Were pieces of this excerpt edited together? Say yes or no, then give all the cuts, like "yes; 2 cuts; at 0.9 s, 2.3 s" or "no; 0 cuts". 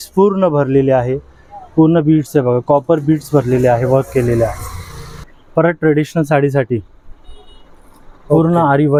no; 0 cuts